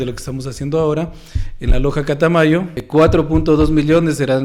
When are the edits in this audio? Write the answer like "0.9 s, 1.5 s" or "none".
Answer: 2.8 s

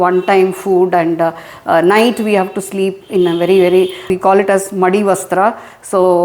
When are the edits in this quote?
4.1 s

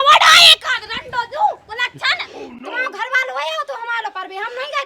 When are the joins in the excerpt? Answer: 2.7 s

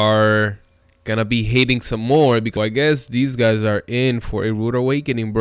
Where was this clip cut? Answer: 2.5 s

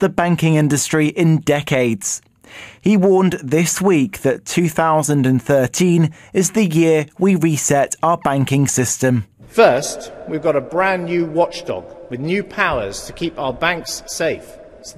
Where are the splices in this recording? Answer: 8.5 s

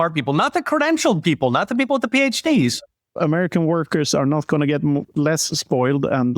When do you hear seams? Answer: 3.2 s

